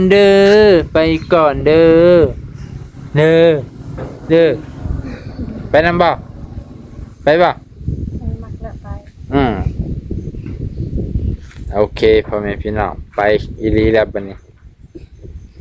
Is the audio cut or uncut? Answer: uncut